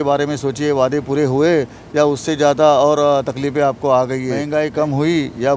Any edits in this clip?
yes; 1 cut; at 4.4 s

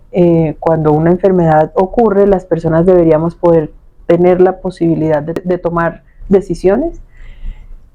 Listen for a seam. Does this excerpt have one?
yes; 1 cut; at 5.4 s

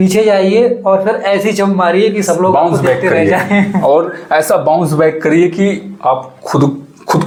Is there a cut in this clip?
no; 0 cuts

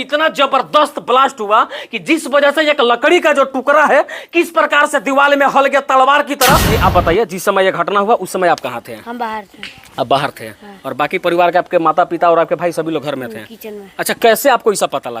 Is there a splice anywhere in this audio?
yes; 1 cut; at 6.7 s

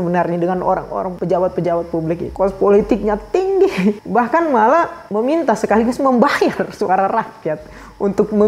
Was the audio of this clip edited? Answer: no; 0 cuts

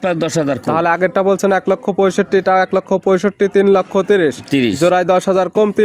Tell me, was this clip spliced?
no; 0 cuts

